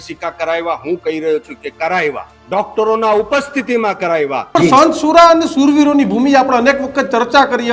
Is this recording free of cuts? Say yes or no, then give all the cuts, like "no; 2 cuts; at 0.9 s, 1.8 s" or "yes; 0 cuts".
no; 2 cuts; at 2.3 s, 4.5 s